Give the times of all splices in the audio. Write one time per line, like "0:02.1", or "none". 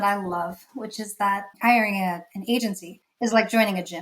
0:01.6